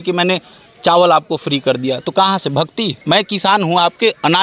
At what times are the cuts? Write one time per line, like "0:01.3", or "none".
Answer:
0:03.0